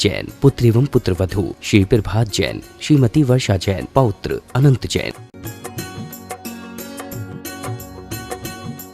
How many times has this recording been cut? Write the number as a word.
one